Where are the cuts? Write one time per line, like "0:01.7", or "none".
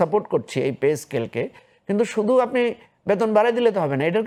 none